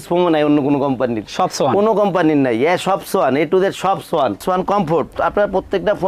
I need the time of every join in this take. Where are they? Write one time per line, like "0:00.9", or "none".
0:04.4